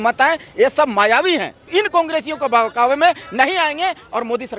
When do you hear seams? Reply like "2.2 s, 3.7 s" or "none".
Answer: 1.6 s